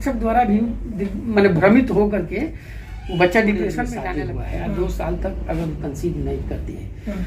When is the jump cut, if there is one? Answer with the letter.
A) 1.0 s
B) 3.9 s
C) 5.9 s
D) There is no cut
B